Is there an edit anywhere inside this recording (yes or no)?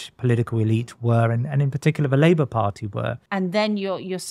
yes